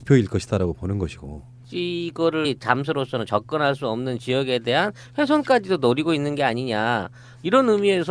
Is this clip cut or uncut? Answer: uncut